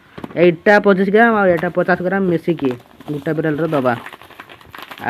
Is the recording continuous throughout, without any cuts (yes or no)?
yes